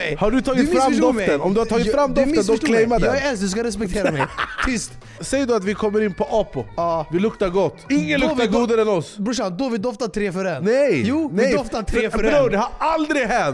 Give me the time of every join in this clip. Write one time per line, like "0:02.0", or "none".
0:05.2
0:06.7
0:07.8
0:10.6